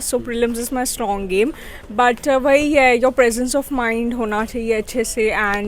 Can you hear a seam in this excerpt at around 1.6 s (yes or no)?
no